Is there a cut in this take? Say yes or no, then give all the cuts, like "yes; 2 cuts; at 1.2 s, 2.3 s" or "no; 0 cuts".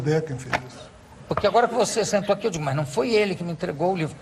no; 0 cuts